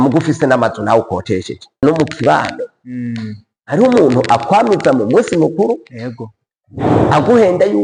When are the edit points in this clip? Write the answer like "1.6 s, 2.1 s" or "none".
1.8 s